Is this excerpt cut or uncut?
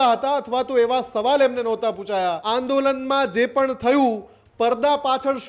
cut